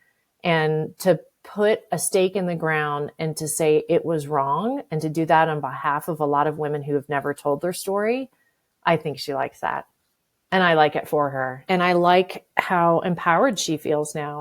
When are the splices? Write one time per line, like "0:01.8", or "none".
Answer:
0:11.6